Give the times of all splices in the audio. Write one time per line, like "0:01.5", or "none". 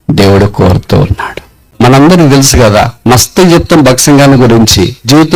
0:01.7